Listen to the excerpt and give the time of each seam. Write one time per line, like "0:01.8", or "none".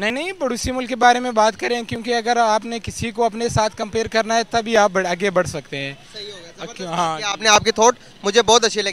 none